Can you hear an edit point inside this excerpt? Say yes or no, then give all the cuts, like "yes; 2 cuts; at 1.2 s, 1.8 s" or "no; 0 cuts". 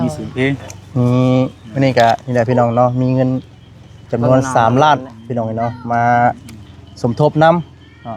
no; 0 cuts